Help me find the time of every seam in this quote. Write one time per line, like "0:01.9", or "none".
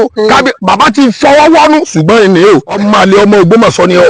0:02.8